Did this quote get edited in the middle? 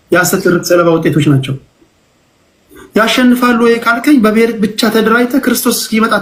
no; 0 cuts

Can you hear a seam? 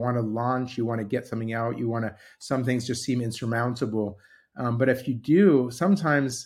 no; 0 cuts

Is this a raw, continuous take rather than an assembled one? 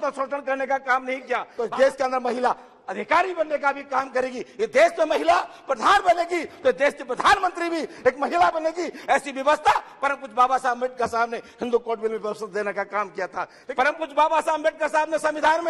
no; 2 cuts; at 1.5 s, 13.6 s

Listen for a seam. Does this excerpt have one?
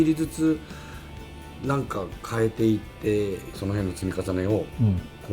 yes; 1 cut; at 3.5 s

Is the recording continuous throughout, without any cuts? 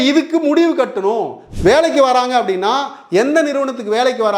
no; 1 cut; at 1.4 s

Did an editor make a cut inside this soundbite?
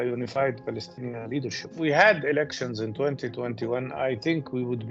yes; 1 cut; at 1.7 s

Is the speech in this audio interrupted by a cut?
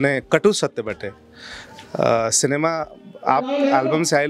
no; 0 cuts

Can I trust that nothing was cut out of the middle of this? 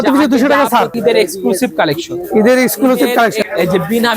no; 2 cuts; at 0.9 s, 3.4 s

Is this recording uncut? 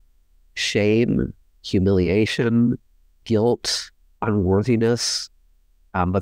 yes; 0 cuts

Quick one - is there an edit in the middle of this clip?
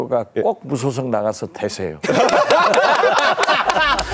no; 0 cuts

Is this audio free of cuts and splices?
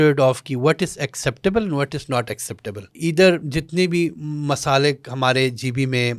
no; 1 cut; at 2.9 s

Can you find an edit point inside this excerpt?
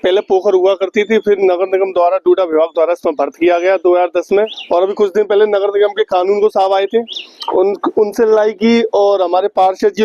yes; 1 cut; at 4.6 s

